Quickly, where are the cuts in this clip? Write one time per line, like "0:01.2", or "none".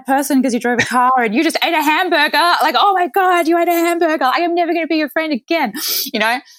none